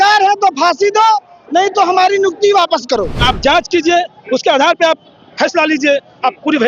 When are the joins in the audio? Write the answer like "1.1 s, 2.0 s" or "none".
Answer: 3.2 s